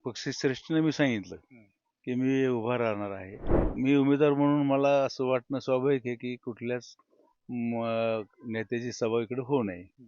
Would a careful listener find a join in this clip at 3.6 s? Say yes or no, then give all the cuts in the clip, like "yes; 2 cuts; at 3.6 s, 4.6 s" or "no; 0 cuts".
yes; 1 cut; at 3.6 s